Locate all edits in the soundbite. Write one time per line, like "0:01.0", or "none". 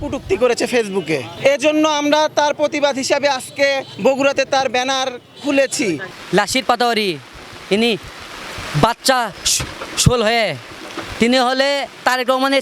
0:01.3
0:03.9
0:06.1